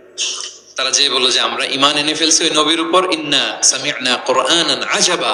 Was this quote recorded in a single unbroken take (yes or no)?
yes